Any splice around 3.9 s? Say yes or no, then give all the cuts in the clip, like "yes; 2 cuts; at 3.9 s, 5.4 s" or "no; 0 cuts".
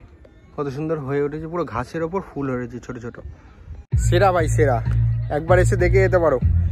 yes; 1 cut; at 3.9 s